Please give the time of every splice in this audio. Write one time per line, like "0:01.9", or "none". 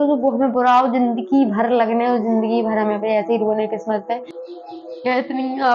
0:04.4